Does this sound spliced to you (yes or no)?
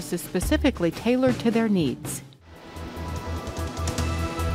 yes